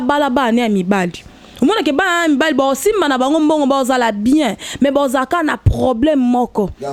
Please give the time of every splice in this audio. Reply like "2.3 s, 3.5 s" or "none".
none